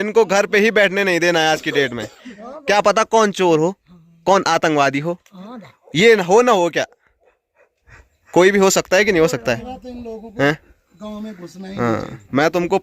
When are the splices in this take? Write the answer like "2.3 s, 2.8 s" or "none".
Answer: none